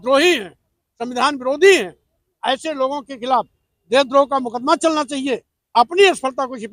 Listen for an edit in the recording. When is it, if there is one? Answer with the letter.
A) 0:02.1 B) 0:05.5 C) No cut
B